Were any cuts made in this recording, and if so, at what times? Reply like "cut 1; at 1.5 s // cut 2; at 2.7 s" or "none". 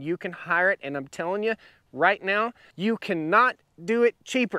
cut 1; at 2.6 s